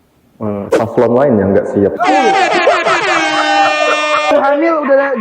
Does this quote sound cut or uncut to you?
cut